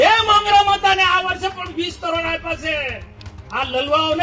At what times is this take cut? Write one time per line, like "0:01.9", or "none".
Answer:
none

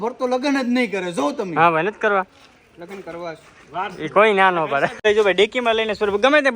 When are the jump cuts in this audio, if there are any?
0:05.0

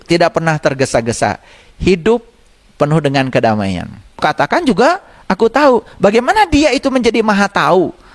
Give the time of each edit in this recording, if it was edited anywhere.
0:04.2

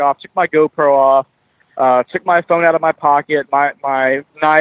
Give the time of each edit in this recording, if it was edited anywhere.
none

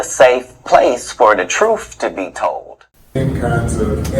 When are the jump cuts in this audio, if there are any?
0:03.2

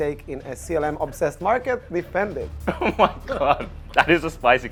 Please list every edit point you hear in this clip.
none

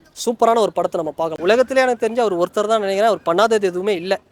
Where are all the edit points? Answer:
0:01.3

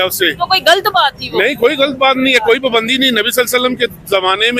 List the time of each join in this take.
none

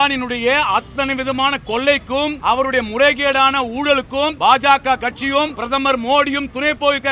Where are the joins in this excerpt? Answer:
0:02.4
0:04.3
0:05.6

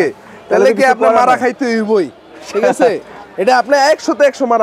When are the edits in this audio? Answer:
none

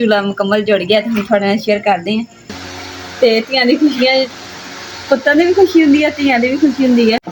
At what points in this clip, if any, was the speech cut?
0:02.5

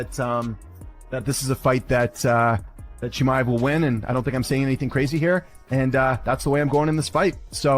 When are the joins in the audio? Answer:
0:06.5

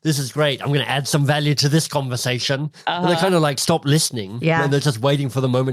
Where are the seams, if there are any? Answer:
0:04.7

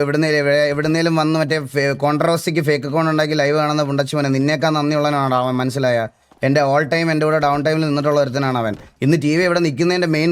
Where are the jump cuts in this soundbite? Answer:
0:08.9

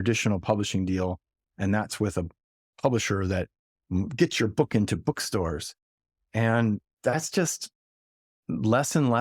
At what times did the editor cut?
none

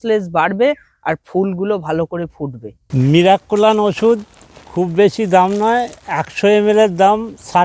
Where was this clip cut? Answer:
none

